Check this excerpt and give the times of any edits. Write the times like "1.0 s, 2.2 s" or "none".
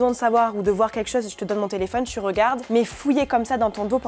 none